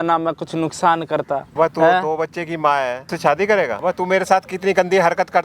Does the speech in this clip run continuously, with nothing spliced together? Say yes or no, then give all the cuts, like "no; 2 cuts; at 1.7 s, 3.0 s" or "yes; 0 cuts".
no; 3 cuts; at 1.5 s, 3.0 s, 3.8 s